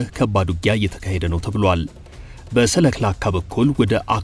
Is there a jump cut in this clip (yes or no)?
yes